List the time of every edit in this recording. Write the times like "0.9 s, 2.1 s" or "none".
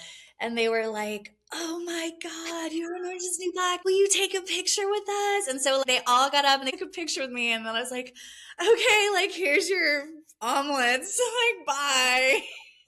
none